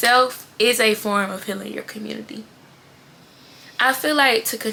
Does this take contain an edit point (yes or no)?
no